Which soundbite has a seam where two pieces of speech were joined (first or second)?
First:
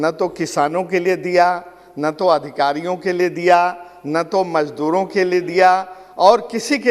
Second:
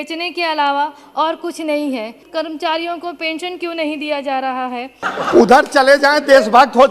second